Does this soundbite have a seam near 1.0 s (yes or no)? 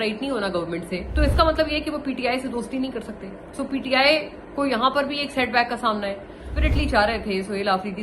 yes